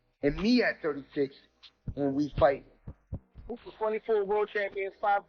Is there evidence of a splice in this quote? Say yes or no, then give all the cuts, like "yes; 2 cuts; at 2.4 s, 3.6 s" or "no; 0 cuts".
yes; 1 cut; at 3.7 s